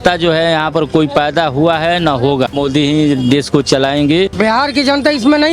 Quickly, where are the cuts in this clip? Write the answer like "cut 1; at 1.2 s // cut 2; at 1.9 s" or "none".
cut 1; at 2.6 s // cut 2; at 4.3 s